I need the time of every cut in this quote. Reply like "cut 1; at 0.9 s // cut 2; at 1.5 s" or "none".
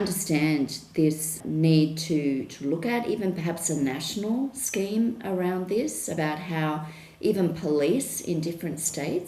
cut 1; at 1.3 s